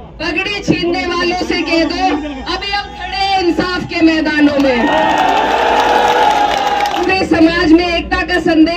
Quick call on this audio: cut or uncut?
cut